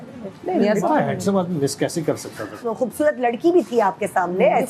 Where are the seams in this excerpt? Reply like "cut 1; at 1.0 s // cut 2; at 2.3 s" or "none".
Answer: cut 1; at 2.6 s